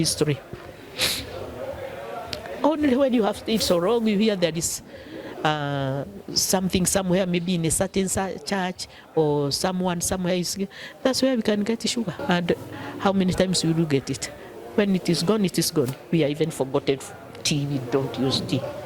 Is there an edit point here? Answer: yes; 1 cut; at 12.2 s

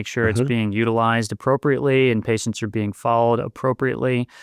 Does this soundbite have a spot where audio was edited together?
no; 0 cuts

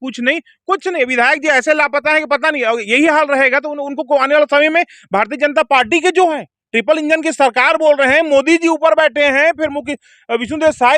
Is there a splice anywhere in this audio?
no; 0 cuts

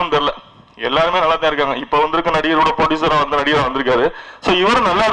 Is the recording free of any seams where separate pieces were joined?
yes; 0 cuts

